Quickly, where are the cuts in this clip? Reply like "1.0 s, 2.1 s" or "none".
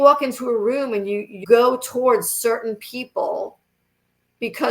1.4 s